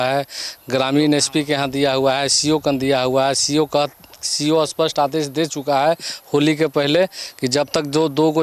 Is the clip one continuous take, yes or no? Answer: yes